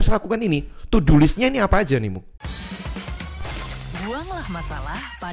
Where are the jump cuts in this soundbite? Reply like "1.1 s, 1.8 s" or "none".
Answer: 2.3 s

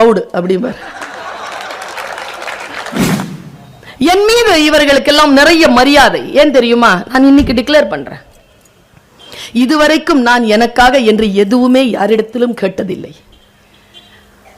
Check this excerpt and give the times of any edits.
3.3 s

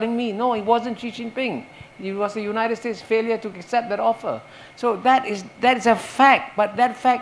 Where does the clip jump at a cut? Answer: none

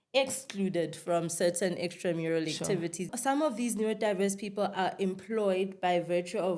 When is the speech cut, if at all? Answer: 3.1 s

